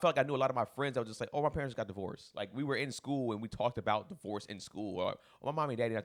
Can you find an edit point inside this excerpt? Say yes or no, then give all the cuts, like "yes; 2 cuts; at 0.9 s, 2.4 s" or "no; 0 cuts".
no; 0 cuts